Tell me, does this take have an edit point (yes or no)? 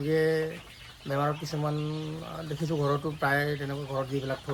no